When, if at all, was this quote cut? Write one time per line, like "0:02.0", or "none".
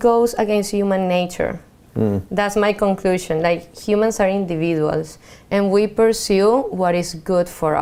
none